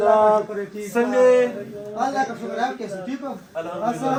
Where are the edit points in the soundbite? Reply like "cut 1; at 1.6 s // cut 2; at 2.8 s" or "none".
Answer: none